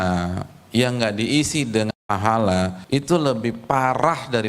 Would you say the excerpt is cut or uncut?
cut